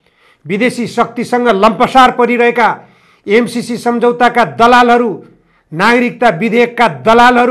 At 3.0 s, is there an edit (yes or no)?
no